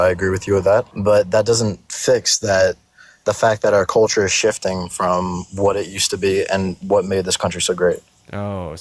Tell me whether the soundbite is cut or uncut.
cut